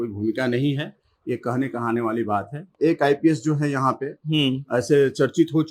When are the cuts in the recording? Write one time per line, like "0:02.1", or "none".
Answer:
0:02.7